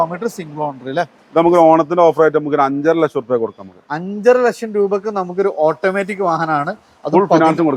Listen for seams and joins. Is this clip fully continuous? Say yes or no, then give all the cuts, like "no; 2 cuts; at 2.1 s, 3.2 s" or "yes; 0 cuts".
yes; 0 cuts